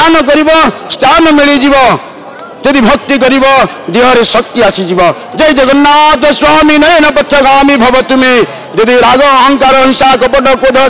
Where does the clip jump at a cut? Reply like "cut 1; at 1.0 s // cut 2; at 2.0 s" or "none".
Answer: none